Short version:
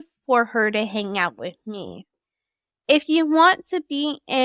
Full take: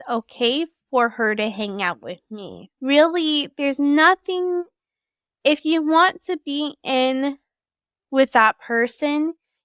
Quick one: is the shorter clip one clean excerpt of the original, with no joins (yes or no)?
no